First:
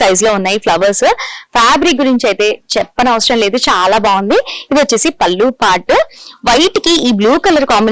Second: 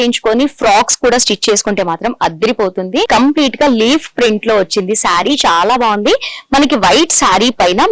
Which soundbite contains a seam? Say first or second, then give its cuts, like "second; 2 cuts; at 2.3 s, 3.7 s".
second; 1 cut; at 3.1 s